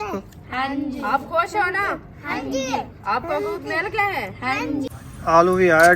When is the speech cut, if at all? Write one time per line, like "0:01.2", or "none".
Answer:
0:04.9

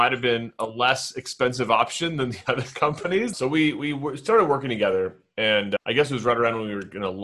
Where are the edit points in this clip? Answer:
0:03.3

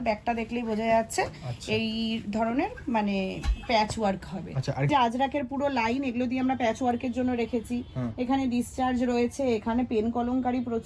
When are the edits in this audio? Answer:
0:04.9

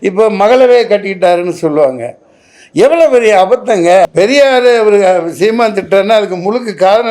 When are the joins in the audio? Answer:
0:04.1

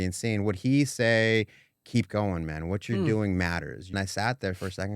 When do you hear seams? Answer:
0:03.9

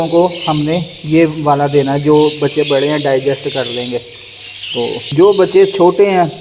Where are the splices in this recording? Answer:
0:05.1

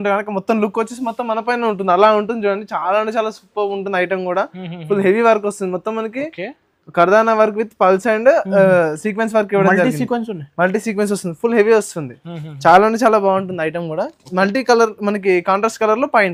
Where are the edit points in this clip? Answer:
none

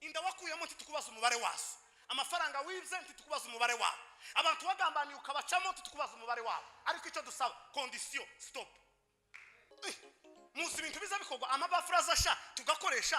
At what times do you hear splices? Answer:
0:09.7

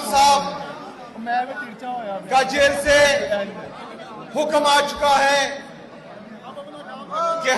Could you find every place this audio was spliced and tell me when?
none

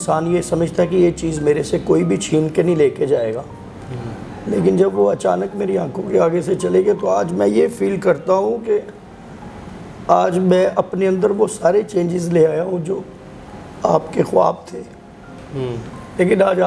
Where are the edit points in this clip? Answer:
none

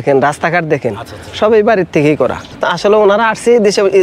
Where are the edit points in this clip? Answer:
0:02.4

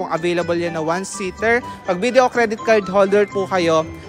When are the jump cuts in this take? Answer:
0:01.7

